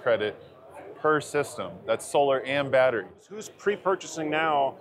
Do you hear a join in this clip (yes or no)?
yes